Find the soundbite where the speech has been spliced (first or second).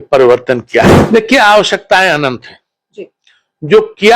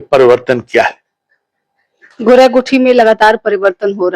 first